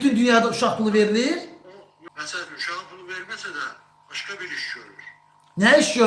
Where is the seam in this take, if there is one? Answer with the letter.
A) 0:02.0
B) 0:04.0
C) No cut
A